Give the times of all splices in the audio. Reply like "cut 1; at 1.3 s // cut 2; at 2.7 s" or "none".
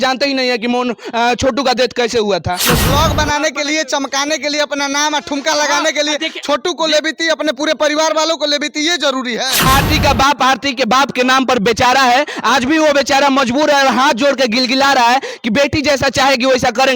cut 1; at 2.7 s // cut 2; at 9.7 s